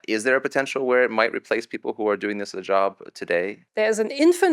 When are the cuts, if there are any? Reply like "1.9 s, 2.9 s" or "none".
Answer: 3.6 s